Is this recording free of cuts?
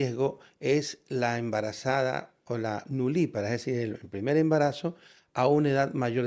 yes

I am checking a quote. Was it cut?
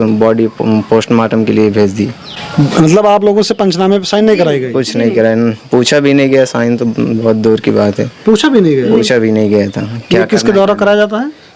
no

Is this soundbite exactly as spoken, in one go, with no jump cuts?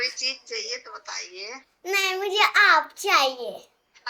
yes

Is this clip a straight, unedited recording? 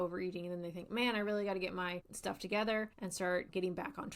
no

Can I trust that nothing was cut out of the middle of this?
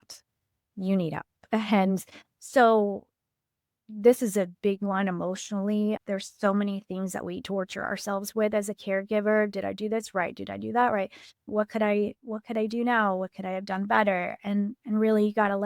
no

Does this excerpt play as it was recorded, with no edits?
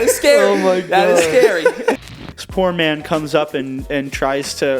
no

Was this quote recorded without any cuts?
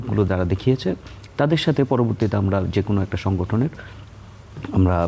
yes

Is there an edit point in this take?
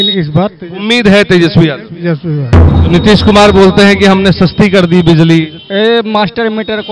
yes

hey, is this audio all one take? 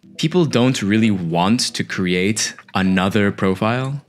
yes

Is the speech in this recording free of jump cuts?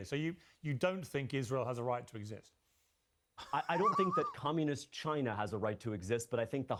yes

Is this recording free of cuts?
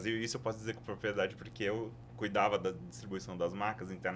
no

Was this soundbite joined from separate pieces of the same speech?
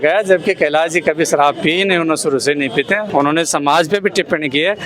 yes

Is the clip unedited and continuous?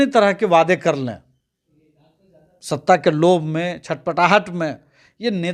yes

